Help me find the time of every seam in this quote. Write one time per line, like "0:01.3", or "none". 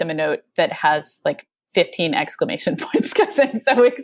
none

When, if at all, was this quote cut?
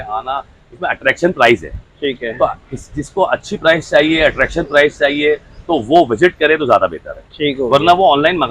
none

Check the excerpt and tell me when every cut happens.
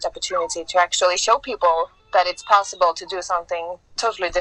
none

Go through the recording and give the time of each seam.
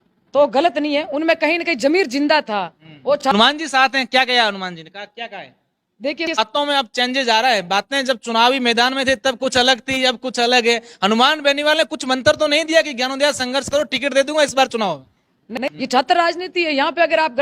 0:03.2
0:06.4
0:15.5

